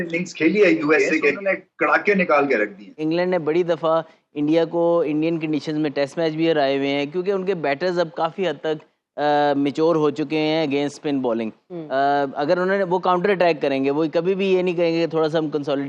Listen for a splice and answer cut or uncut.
cut